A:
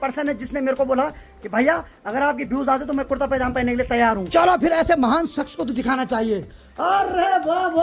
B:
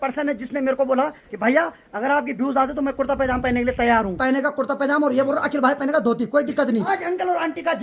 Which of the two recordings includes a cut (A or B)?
B